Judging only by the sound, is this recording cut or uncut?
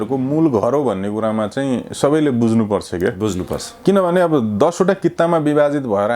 uncut